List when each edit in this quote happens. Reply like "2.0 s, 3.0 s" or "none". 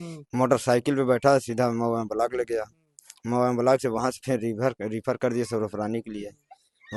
none